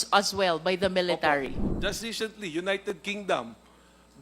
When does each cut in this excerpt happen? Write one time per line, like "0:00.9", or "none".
0:01.6